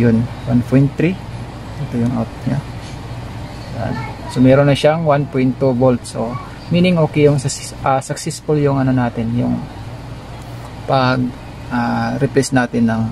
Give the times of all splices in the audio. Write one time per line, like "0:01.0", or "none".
none